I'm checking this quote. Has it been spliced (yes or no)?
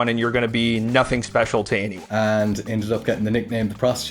yes